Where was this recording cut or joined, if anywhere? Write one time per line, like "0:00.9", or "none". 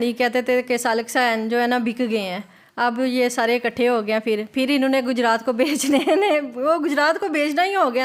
none